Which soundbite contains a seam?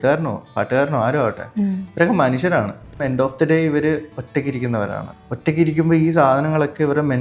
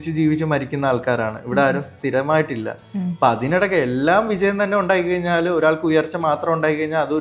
first; 2 cuts; at 3.0 s, 5.1 s

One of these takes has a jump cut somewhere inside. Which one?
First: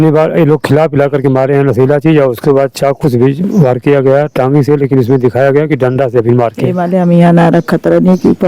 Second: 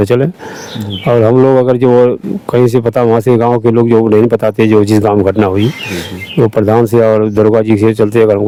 first; 1 cut; at 6.8 s

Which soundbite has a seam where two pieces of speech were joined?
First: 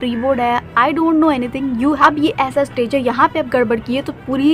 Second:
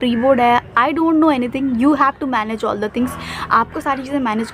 first; 1 cut; at 2.0 s

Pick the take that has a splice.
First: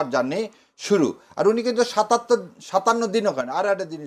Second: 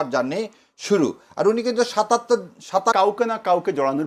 second; 1 cut; at 2.9 s

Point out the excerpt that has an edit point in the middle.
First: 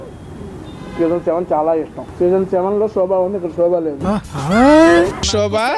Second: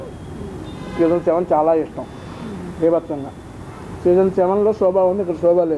first; 1 cut; at 2.0 s

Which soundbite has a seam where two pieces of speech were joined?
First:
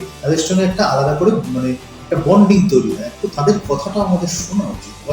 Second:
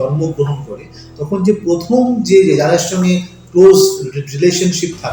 first; 1 cut; at 3.1 s

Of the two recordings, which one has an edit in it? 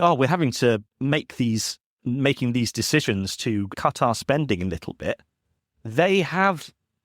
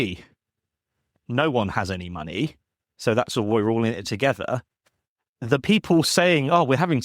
second; 1 cut; at 1.2 s

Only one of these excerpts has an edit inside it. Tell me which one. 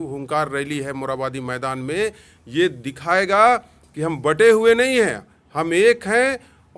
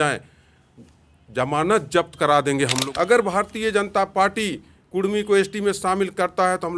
second; 1 cut; at 2.8 s

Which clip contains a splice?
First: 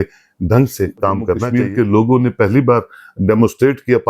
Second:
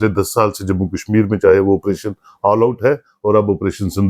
first; 1 cut; at 1.5 s

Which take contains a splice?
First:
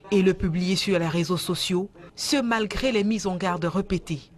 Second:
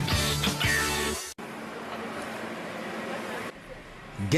second; 1 cut; at 1.2 s

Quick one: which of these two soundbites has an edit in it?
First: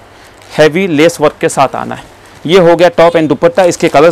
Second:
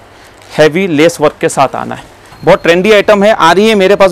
second; 1 cut; at 2.3 s

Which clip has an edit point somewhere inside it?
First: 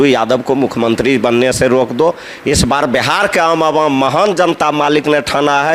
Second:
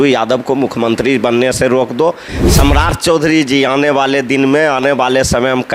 second; 1 cut; at 2.3 s

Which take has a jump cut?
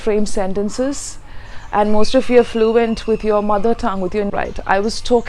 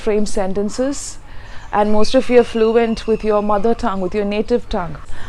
first; 1 cut; at 4.3 s

